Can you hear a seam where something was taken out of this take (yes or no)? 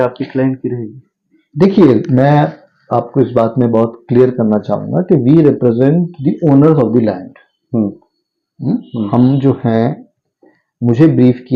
no